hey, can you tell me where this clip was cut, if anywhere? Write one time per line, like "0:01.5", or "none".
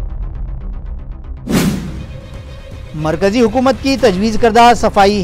0:01.9